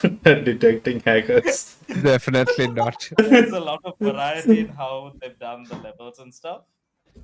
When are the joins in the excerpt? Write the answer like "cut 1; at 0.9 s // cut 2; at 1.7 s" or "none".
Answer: cut 1; at 3.2 s